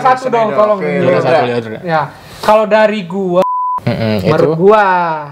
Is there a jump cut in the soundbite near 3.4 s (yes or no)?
yes